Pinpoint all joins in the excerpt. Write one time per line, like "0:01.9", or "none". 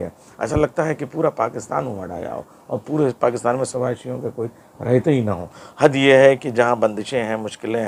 none